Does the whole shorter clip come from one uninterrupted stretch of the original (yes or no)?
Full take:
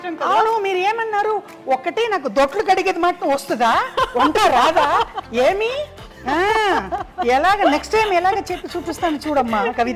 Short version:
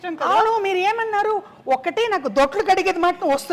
yes